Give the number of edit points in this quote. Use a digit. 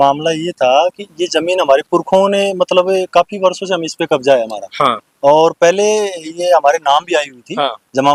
0